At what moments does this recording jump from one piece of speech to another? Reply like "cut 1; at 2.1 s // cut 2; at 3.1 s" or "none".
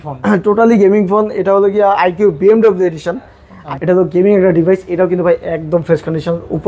cut 1; at 3.5 s